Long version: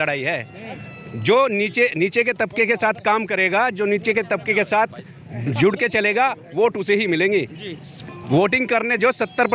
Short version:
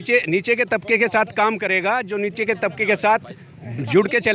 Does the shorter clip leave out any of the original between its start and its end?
no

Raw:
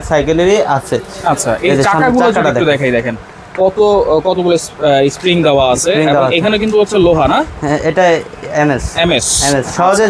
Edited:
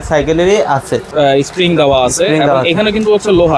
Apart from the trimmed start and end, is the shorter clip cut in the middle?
yes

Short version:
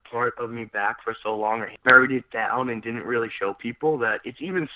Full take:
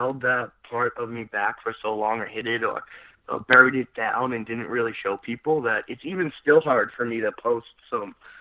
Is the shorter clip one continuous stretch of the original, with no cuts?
no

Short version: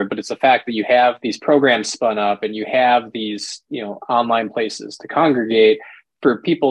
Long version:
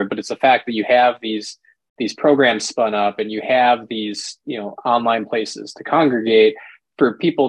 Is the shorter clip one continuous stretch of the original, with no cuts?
no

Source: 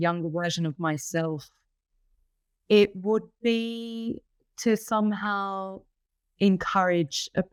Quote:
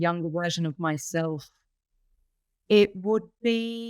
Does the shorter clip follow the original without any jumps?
yes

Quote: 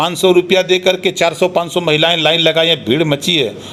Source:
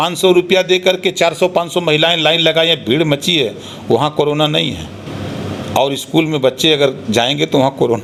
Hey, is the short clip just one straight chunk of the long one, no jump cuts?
yes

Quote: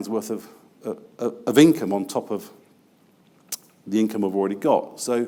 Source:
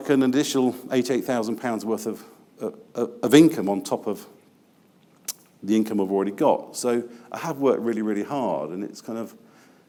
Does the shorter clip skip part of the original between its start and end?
no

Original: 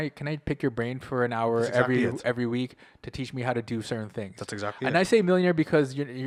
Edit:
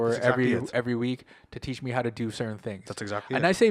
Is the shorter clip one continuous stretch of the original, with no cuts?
yes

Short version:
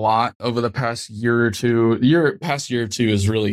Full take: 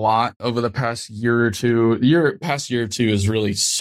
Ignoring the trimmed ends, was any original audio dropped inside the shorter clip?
no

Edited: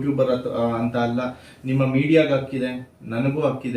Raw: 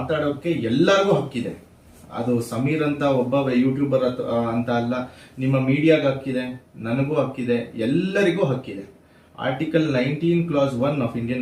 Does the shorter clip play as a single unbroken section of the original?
yes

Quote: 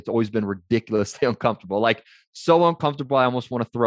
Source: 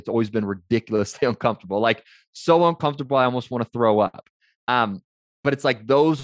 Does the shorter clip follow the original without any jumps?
yes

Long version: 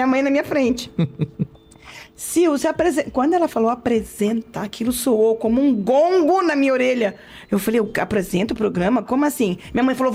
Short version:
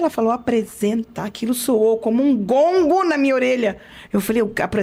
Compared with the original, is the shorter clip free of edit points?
yes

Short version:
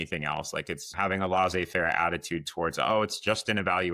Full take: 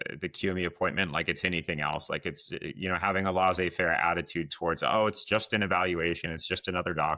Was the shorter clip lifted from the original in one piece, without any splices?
no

